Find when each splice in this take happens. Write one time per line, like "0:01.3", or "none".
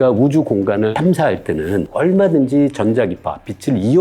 0:00.9